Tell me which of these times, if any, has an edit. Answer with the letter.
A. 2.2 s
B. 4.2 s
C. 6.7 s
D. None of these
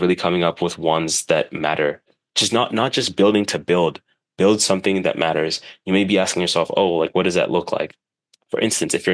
A